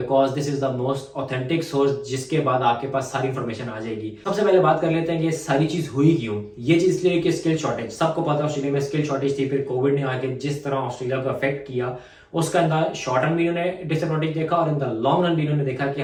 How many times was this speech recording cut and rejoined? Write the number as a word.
zero